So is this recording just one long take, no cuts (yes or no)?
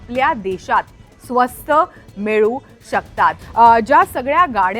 no